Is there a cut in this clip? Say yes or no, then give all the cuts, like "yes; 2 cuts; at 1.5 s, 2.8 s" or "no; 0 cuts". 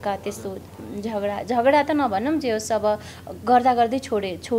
no; 0 cuts